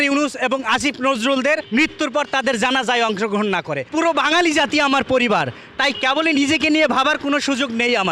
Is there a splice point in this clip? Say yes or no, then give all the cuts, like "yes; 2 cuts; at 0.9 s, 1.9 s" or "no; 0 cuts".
yes; 2 cuts; at 1.6 s, 3.8 s